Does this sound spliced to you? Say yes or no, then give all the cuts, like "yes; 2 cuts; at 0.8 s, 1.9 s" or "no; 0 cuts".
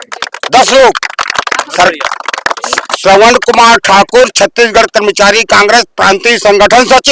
no; 0 cuts